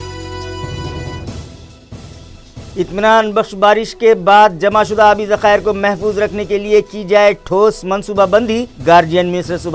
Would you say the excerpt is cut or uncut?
uncut